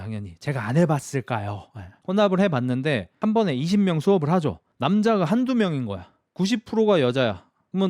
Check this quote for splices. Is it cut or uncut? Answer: cut